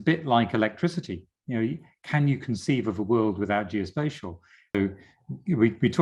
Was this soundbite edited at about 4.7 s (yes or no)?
yes